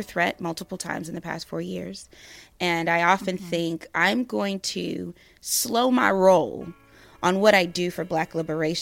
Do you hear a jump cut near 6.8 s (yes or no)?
no